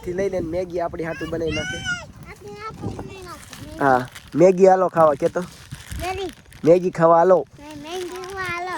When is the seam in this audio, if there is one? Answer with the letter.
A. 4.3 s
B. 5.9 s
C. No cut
C